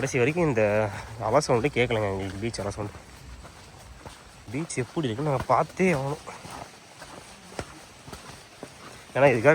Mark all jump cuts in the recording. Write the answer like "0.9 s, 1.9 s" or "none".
4.5 s